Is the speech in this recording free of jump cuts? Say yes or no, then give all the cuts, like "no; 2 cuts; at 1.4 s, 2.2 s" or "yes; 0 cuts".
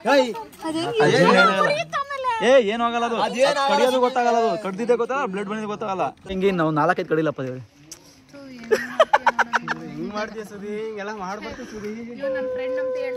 no; 1 cut; at 6.3 s